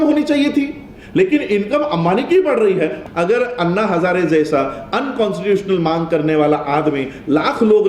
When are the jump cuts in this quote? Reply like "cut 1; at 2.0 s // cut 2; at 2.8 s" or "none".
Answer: cut 1; at 3.0 s